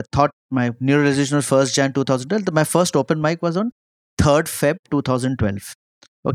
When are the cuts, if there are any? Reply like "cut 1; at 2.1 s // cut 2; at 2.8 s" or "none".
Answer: none